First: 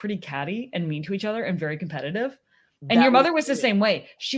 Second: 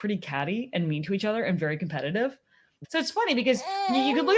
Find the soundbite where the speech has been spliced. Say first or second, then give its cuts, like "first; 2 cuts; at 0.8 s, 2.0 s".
second; 1 cut; at 2.8 s